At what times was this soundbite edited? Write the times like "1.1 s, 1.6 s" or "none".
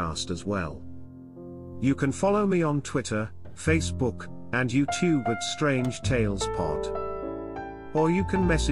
6.5 s, 7.8 s